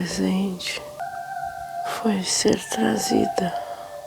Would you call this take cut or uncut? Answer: cut